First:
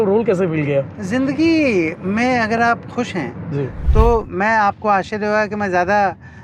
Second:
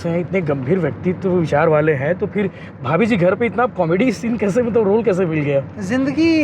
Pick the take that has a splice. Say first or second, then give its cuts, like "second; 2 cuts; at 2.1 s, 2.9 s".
first; 1 cut; at 3.8 s